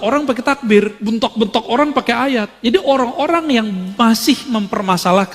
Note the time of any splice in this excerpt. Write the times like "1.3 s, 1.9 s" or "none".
1.0 s, 2.5 s